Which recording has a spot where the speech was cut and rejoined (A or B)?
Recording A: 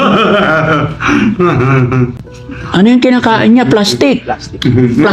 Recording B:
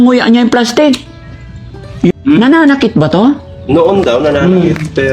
B